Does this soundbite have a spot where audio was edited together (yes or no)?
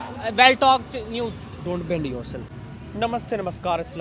yes